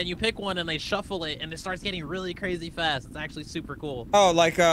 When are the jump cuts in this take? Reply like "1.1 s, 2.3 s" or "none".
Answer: none